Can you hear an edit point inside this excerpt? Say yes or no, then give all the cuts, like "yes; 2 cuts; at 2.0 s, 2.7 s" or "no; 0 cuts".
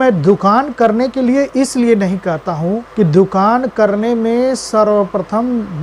yes; 1 cut; at 2.8 s